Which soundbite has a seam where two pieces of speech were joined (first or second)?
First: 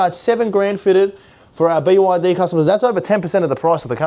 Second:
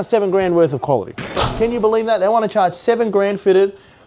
second